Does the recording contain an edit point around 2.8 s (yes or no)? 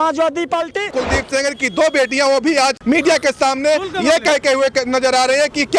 yes